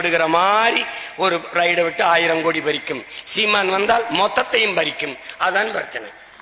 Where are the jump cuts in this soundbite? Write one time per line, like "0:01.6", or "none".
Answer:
none